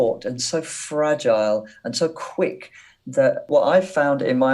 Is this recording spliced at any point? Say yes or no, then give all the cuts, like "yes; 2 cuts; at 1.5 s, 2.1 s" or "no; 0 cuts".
yes; 1 cut; at 3.5 s